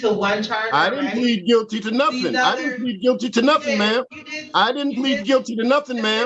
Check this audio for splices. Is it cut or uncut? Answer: uncut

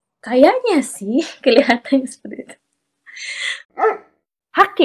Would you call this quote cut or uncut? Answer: cut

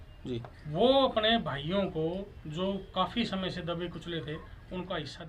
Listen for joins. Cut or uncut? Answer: uncut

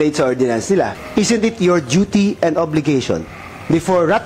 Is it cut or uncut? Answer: cut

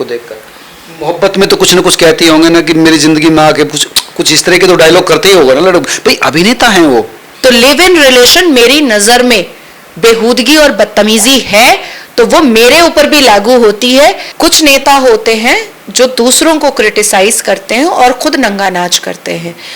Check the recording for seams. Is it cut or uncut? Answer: cut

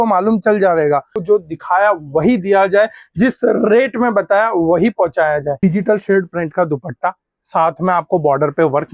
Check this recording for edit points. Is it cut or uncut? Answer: cut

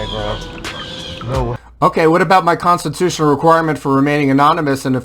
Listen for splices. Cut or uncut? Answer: cut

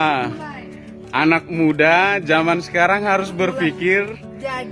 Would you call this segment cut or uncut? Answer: uncut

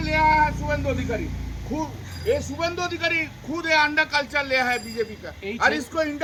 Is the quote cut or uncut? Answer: uncut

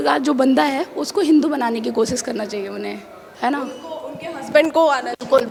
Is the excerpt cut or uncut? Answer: uncut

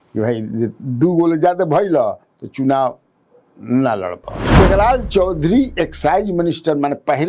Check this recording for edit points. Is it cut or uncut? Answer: cut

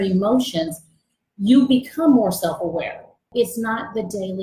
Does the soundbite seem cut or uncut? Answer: cut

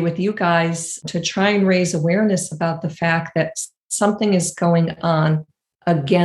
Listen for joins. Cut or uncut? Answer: cut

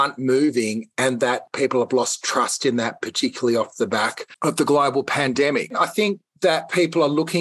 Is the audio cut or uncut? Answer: cut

